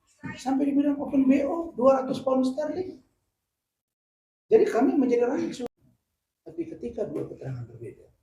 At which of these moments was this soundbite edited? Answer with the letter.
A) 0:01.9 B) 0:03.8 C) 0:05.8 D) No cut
C